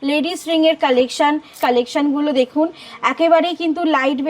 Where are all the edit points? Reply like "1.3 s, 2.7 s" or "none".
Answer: 1.5 s